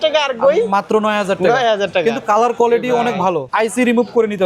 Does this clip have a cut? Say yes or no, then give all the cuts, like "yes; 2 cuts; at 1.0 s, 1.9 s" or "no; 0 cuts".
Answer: yes; 1 cut; at 3.5 s